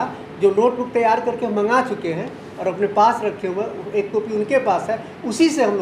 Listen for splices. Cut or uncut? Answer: uncut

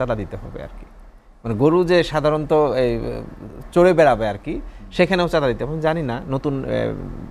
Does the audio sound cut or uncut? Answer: uncut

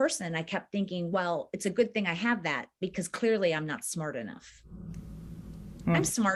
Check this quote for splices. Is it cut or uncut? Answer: uncut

